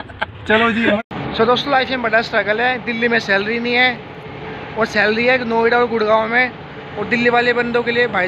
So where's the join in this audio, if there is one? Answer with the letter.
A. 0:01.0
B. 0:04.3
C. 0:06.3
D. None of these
A